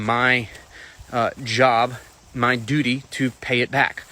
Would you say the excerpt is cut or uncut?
uncut